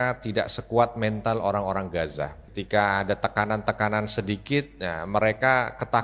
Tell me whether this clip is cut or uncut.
cut